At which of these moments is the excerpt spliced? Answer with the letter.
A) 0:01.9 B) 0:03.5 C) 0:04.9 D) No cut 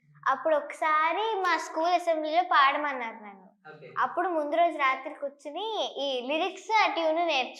D